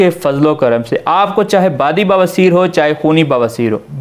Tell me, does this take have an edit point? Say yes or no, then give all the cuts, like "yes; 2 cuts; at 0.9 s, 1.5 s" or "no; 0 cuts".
no; 0 cuts